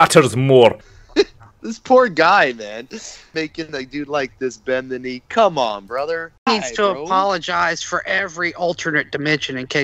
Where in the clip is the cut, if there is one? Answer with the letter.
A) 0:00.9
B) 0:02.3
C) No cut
A